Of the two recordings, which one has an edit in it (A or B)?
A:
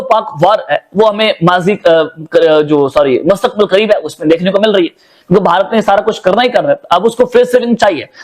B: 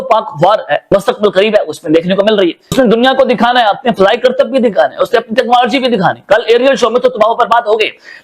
B